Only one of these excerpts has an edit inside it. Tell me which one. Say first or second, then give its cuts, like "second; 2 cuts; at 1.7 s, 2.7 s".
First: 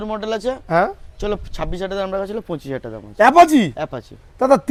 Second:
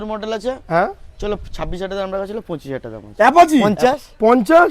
second; 1 cut; at 3.6 s